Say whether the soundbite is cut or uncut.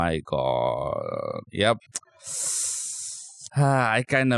uncut